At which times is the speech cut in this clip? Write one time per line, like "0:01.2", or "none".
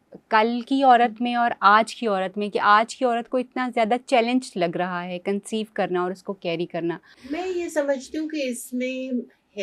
0:07.1